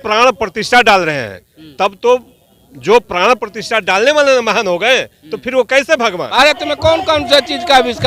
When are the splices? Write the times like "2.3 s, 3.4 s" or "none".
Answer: 6.3 s